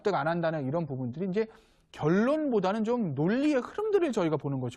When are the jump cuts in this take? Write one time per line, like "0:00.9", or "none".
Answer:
none